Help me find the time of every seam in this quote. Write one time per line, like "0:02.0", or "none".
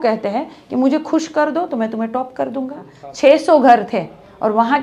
0:03.0